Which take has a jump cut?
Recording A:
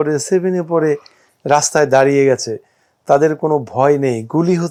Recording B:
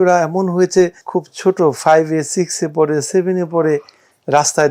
B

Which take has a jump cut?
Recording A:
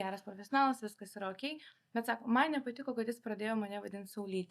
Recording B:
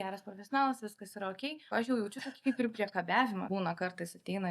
B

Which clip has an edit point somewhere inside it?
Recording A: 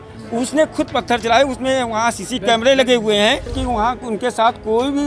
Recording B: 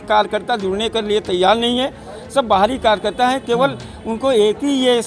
A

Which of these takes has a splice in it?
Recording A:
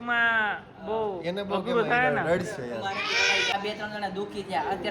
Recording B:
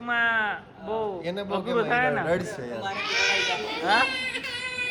A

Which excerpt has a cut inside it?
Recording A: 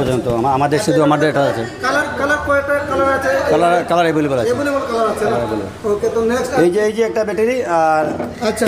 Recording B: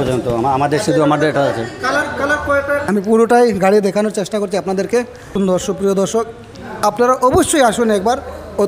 B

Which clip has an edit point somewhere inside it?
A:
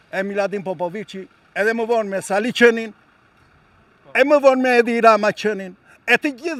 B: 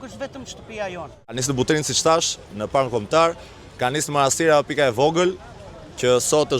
B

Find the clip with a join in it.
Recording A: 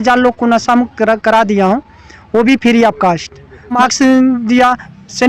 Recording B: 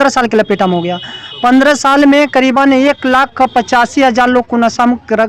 A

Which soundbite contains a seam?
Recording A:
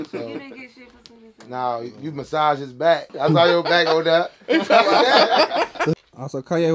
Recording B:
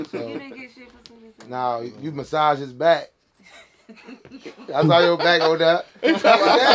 A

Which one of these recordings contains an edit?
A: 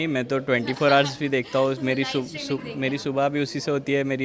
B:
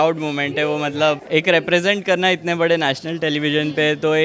B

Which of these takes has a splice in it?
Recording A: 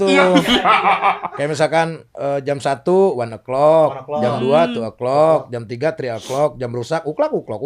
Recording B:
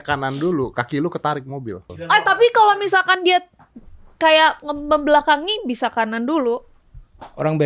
B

